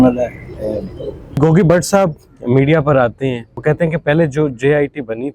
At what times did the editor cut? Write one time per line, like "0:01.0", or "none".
0:01.4
0:03.5

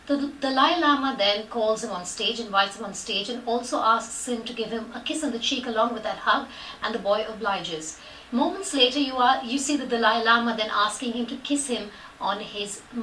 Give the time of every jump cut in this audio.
none

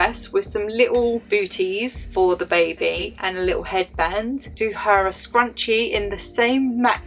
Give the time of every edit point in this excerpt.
0:03.1
0:04.5

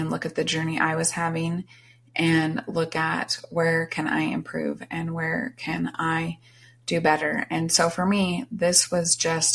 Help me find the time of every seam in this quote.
none

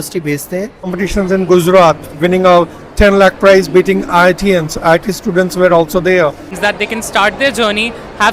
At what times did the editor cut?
0:00.9
0:06.5

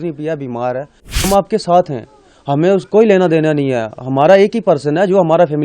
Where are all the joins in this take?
0:01.3

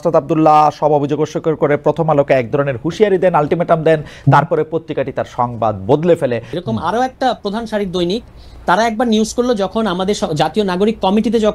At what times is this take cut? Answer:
0:06.6

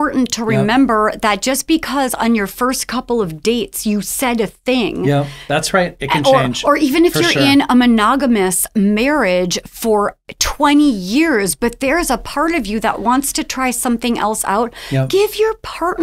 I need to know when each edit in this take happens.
none

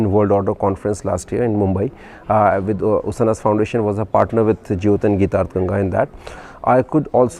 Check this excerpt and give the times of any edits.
none

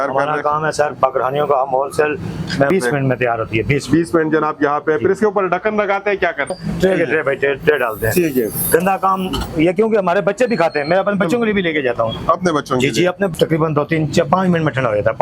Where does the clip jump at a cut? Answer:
0:02.7
0:06.5
0:13.3

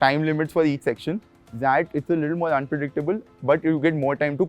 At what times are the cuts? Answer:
0:01.3

